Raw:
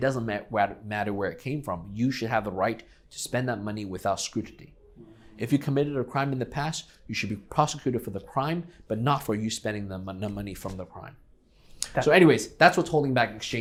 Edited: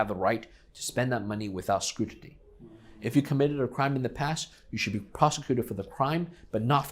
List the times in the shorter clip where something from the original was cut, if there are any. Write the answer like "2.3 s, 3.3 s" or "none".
none

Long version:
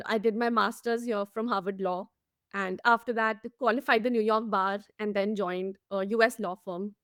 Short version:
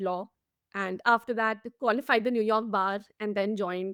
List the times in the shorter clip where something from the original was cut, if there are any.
none

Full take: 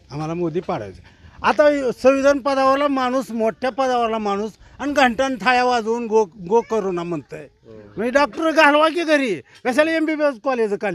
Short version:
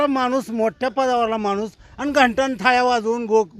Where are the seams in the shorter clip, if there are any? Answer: none

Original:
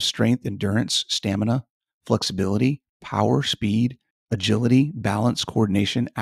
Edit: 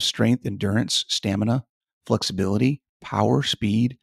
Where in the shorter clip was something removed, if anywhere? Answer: none

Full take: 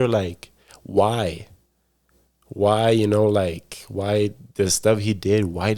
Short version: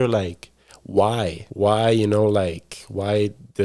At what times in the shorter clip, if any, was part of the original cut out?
1.4 s

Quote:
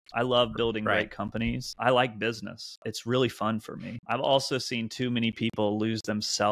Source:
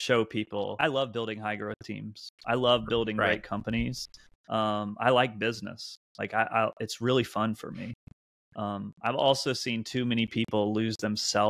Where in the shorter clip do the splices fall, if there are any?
1.7 s, 2.9 s, 4.0 s

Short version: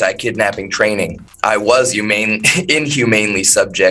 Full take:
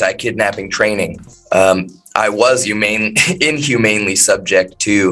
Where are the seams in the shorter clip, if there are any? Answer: 1.3 s

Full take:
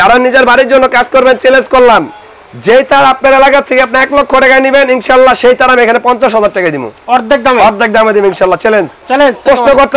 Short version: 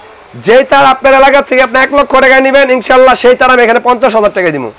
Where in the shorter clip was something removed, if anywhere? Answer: none

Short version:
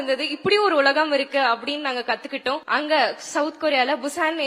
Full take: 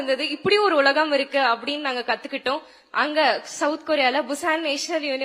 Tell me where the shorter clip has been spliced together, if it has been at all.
2.6 s

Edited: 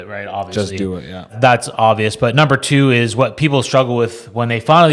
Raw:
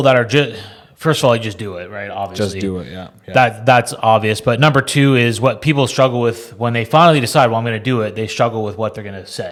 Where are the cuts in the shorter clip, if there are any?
1.3 s

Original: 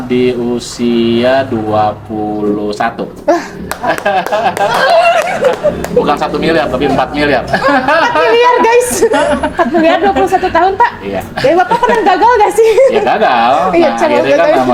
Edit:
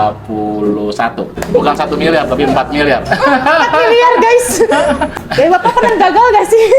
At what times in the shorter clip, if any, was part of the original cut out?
1.4 s, 5.1 s

